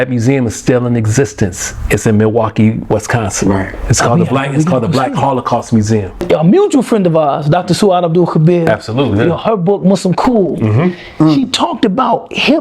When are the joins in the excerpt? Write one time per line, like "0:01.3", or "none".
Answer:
0:06.2